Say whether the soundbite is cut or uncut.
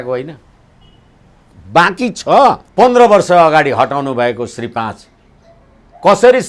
cut